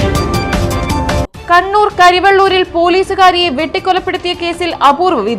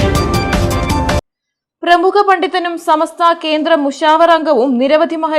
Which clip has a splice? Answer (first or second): first